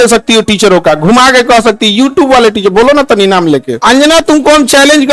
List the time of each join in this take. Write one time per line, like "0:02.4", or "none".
0:03.8